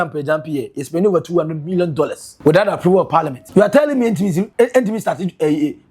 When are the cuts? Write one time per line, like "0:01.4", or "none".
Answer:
0:02.2
0:03.4
0:04.5